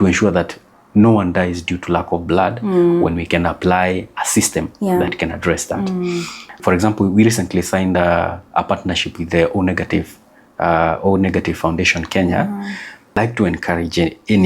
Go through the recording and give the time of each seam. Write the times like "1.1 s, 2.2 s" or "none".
6.6 s, 13.2 s

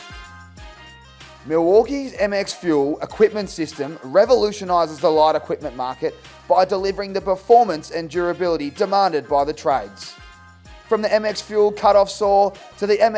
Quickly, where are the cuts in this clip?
1.4 s

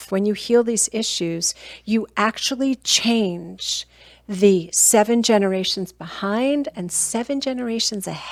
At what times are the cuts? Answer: none

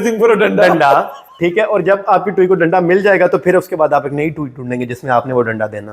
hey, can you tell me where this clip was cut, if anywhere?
none

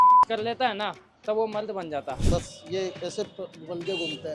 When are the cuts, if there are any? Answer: 2.1 s

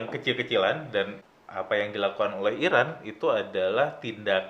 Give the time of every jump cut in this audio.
1.2 s

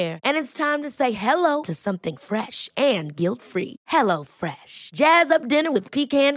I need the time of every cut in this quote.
none

